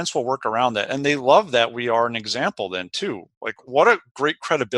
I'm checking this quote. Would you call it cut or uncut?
cut